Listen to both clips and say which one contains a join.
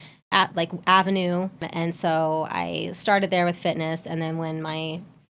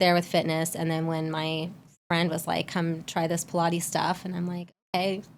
first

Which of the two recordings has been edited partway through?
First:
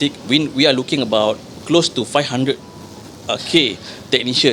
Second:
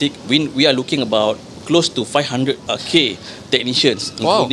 second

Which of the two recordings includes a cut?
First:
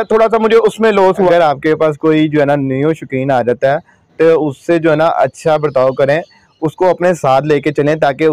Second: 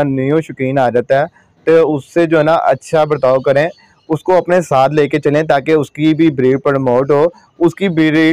first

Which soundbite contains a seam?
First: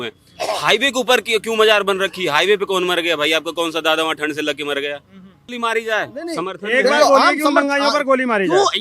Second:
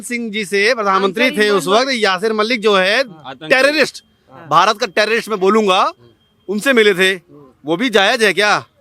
first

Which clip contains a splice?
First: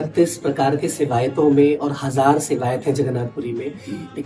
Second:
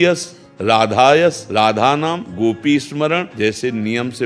second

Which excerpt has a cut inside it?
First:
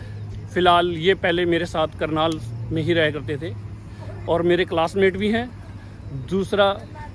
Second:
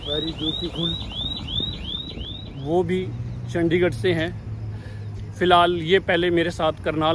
second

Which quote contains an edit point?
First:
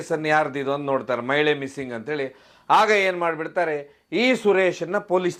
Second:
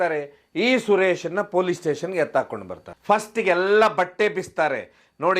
second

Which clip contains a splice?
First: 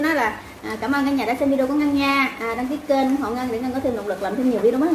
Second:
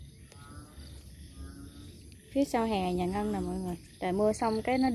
second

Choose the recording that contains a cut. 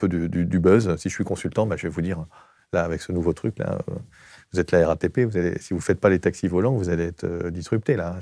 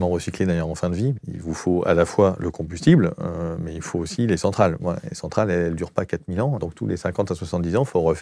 second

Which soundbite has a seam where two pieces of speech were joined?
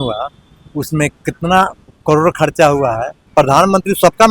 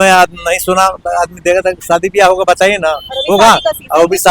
first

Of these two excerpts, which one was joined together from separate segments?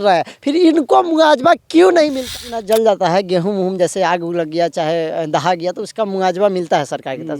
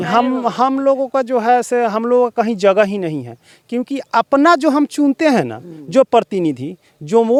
first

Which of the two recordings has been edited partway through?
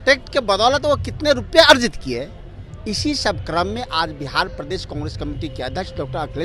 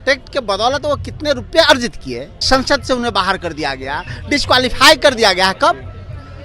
second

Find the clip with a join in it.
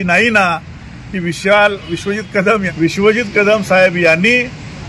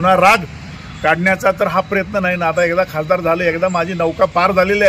first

